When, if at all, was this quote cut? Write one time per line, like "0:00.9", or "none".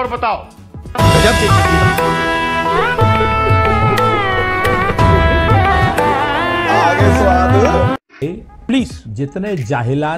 0:08.1